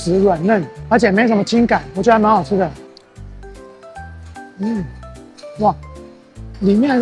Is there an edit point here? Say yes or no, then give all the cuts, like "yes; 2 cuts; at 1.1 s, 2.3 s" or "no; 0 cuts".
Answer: no; 0 cuts